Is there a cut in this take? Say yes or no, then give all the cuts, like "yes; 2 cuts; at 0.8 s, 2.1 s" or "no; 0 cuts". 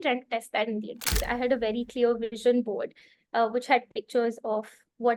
yes; 1 cut; at 1.3 s